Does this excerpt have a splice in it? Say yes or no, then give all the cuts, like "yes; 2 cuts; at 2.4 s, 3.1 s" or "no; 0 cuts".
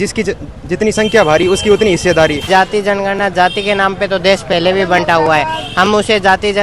yes; 1 cut; at 2.4 s